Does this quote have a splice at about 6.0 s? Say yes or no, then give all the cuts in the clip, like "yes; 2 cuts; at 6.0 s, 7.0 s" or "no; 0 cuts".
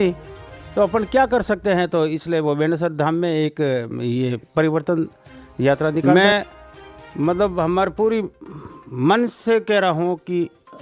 yes; 1 cut; at 6.0 s